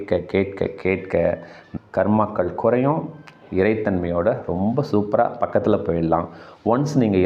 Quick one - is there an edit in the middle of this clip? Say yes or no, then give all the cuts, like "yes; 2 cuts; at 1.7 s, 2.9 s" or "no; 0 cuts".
yes; 1 cut; at 1.6 s